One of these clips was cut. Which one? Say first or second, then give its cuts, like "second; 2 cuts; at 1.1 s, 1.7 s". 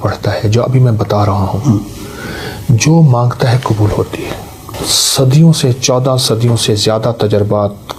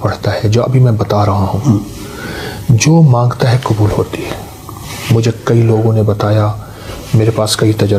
first; 1 cut; at 4.7 s